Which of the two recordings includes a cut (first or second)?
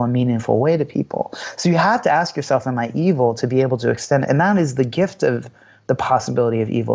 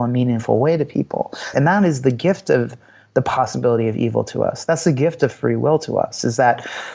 second